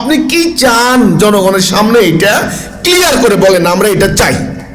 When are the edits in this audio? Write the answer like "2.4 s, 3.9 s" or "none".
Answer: none